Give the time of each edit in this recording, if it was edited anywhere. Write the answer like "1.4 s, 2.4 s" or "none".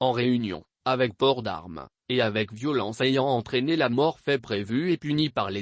3.9 s